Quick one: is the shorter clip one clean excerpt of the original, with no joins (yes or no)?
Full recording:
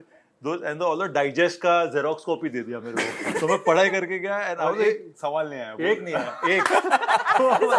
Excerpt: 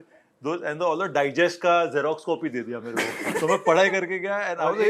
yes